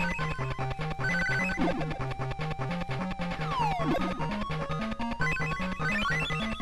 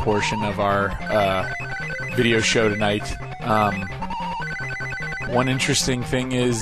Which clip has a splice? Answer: second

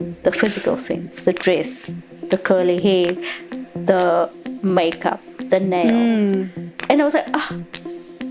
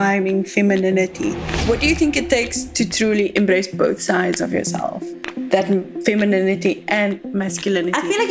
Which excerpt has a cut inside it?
second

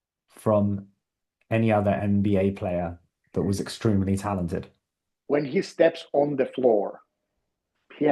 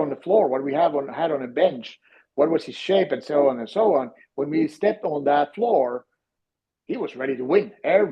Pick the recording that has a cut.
first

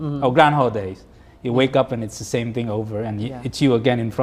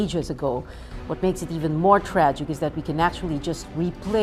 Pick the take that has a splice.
second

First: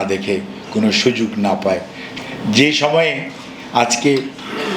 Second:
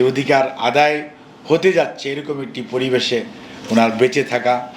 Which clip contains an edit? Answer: first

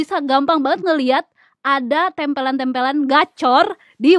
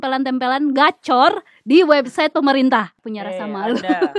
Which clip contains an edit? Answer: second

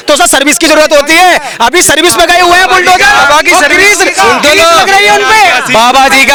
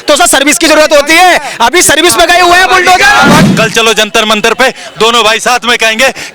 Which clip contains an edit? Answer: second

